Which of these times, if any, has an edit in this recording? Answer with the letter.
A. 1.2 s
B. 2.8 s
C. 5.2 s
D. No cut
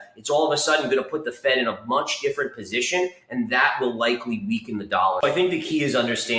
C